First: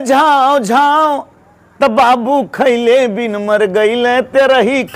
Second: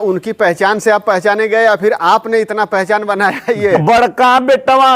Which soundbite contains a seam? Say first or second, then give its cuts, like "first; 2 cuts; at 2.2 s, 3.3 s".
second; 1 cut; at 3.8 s